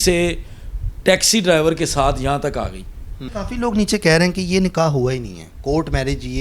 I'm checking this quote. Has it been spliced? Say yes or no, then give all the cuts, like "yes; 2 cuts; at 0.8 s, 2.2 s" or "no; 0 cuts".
yes; 1 cut; at 3.2 s